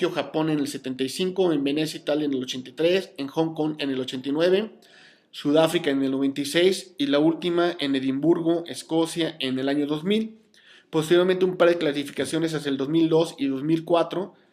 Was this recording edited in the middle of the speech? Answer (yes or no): yes